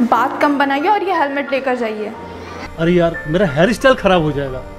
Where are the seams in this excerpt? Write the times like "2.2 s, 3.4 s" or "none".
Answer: 2.1 s